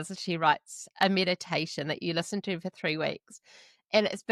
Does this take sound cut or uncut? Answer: uncut